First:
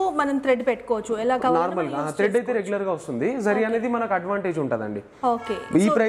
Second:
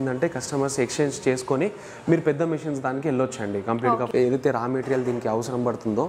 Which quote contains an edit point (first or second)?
second